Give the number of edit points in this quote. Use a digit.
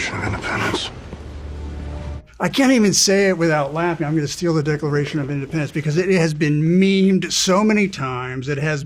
0